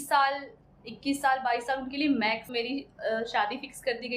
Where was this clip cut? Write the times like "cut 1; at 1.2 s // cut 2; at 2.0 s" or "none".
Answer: cut 1; at 2.5 s